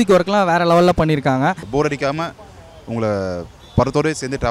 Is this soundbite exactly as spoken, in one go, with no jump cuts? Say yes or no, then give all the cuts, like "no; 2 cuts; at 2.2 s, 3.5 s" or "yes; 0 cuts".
no; 1 cut; at 1.6 s